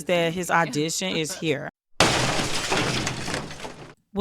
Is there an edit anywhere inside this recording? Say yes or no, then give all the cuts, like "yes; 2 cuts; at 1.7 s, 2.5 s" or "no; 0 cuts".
yes; 1 cut; at 1.4 s